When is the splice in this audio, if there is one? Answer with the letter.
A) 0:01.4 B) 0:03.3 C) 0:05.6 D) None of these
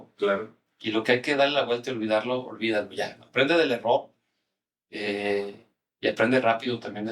D